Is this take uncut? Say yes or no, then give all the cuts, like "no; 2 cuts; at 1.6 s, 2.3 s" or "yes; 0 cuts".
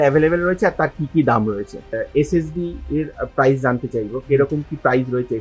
no; 1 cut; at 1.9 s